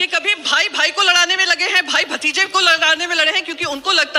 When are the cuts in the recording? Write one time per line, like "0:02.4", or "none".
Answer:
none